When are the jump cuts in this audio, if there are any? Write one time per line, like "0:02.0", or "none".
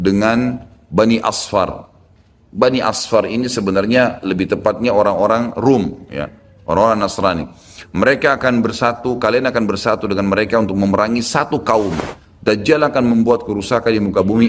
0:12.2